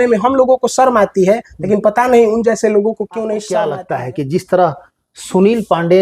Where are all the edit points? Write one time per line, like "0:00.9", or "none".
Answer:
0:03.8